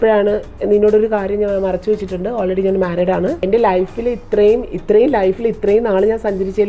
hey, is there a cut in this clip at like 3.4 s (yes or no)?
yes